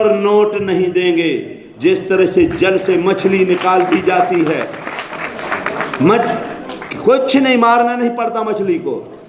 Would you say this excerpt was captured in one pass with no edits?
yes; 0 cuts

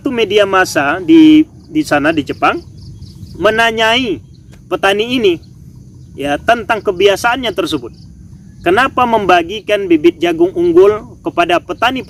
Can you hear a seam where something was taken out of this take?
no; 0 cuts

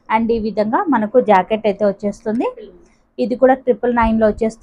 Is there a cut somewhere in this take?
no; 0 cuts

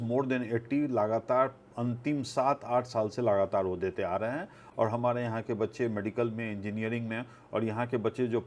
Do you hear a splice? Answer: no; 0 cuts

